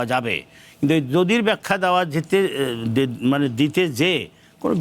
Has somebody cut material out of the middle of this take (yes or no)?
no